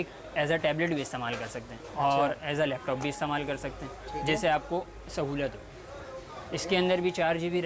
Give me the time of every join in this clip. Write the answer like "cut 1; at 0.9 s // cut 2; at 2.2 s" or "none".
none